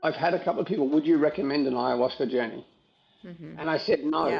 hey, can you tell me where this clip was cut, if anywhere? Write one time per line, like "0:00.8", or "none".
none